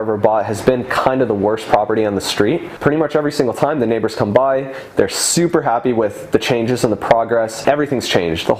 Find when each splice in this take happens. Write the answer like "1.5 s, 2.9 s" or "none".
2.7 s, 7.6 s